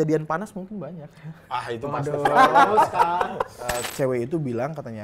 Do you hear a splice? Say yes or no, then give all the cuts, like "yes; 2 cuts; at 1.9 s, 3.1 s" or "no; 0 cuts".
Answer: yes; 1 cut; at 3.8 s